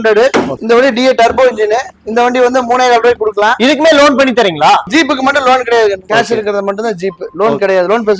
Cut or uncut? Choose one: uncut